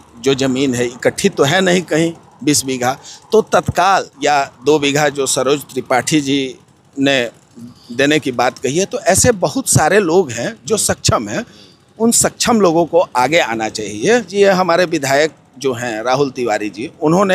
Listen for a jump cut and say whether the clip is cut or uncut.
cut